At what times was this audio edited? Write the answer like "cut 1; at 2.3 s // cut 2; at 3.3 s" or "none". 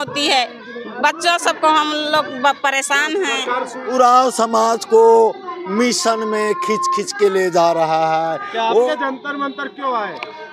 cut 1; at 3.8 s // cut 2; at 8.9 s

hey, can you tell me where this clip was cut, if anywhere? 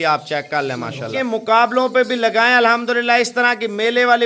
cut 1; at 1.1 s

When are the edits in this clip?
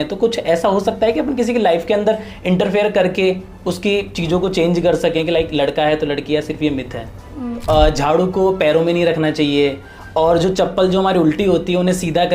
cut 1; at 7.5 s

